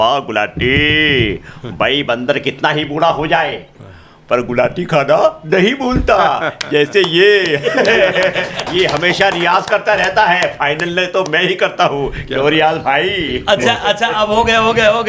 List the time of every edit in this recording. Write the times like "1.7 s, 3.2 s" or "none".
none